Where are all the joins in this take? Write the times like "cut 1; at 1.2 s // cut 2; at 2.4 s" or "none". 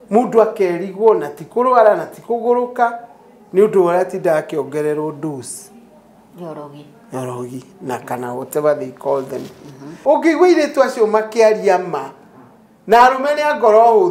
cut 1; at 9.8 s